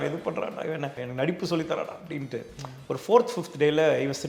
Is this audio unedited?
no; 1 cut; at 1.0 s

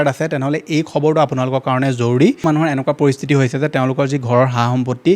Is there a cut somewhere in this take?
yes; 1 cut; at 2.4 s

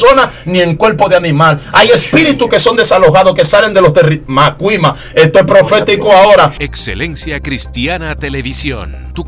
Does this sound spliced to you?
yes; 1 cut; at 6.6 s

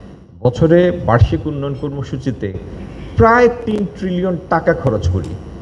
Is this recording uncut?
yes; 0 cuts

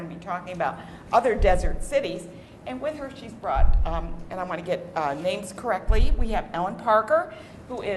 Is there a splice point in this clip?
yes; 1 cut; at 2.3 s

